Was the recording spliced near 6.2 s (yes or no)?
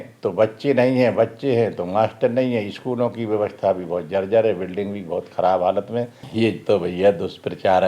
yes